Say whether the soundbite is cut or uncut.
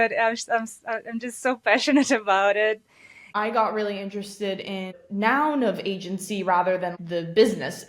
cut